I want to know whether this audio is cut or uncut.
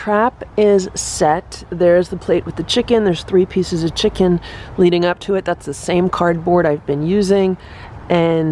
uncut